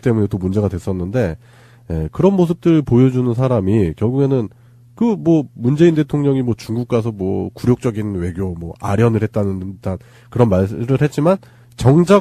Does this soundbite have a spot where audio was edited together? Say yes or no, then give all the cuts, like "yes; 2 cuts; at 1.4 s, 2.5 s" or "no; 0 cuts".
yes; 1 cut; at 7.5 s